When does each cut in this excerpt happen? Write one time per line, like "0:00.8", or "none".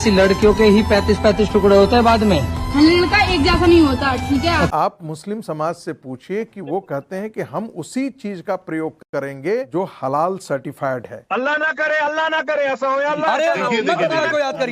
0:04.7
0:09.7
0:11.1